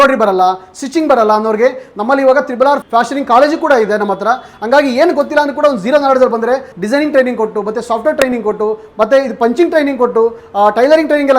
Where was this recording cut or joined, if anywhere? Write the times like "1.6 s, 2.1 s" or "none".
2.8 s, 6.7 s